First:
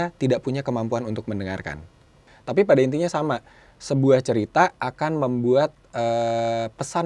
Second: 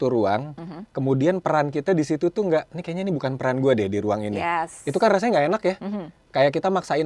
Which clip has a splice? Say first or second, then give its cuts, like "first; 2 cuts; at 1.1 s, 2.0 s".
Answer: first; 1 cut; at 2.2 s